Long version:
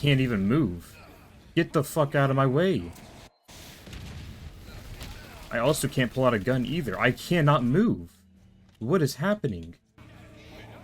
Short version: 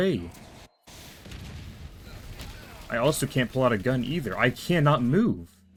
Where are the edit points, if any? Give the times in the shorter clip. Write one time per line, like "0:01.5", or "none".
none